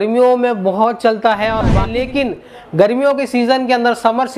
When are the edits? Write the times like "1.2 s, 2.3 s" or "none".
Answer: 1.8 s